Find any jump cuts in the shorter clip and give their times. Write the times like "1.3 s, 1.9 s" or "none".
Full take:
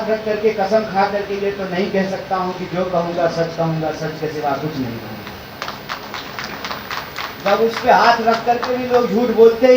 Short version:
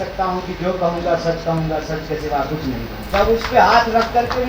3.0 s